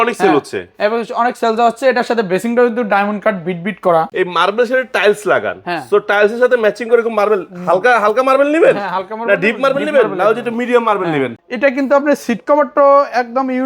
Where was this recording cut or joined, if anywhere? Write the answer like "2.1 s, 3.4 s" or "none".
4.1 s, 11.4 s